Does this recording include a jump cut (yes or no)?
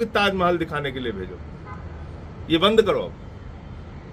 no